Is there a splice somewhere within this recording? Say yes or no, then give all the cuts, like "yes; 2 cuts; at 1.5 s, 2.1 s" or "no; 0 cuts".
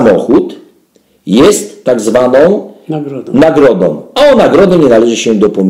no; 0 cuts